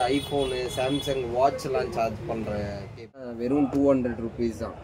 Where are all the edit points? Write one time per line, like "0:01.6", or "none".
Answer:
0:03.3